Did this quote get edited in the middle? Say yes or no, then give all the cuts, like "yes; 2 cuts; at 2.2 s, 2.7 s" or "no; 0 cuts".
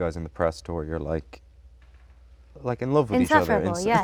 no; 0 cuts